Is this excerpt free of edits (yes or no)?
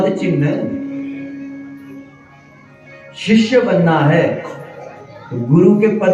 yes